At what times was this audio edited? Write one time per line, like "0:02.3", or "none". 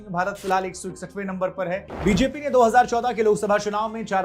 0:01.9